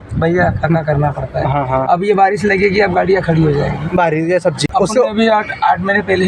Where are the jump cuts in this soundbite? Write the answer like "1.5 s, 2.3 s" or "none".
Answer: 4.6 s